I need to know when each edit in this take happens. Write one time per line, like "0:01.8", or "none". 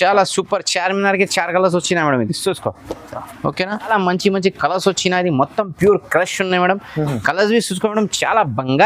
0:03.9